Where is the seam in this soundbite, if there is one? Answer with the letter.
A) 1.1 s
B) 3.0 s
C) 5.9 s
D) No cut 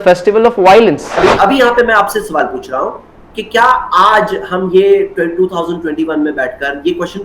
A